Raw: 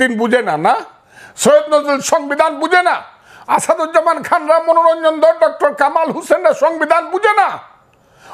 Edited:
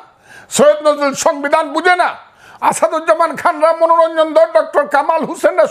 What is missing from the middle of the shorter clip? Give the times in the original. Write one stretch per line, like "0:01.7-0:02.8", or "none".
none